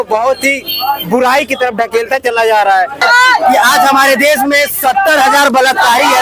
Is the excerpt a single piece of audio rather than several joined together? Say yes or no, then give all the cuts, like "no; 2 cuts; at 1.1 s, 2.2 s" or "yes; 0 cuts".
no; 1 cut; at 3.0 s